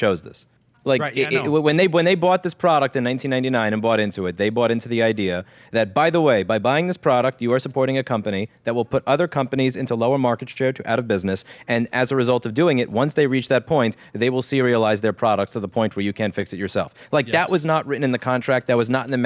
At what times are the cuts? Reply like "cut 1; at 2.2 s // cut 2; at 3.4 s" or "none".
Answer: none